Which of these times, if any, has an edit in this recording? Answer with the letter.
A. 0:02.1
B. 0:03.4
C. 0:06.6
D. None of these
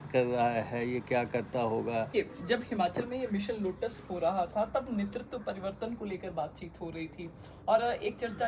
A